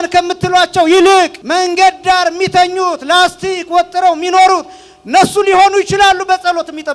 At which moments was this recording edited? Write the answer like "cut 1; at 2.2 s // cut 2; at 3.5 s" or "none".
cut 1; at 1.4 s